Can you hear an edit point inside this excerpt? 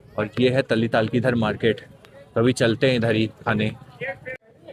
no; 0 cuts

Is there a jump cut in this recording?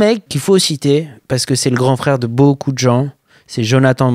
no; 0 cuts

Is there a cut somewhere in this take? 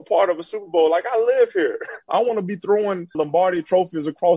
yes; 2 cuts; at 2.1 s, 3.2 s

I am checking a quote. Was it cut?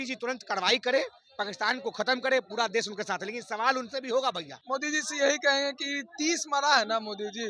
yes; 1 cut; at 4.5 s

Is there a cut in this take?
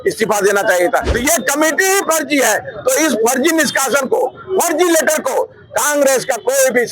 yes; 1 cut; at 1.1 s

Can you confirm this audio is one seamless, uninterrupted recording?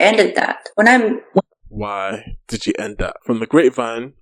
no; 1 cut; at 3.2 s

